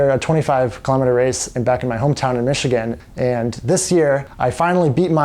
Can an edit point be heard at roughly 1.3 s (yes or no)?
no